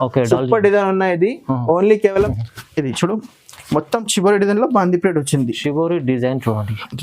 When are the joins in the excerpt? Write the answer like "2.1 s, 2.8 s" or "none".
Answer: 2.3 s